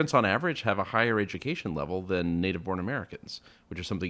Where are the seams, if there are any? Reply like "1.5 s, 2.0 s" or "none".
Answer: none